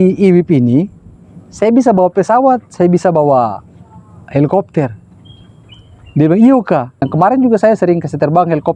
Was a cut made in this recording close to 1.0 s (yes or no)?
no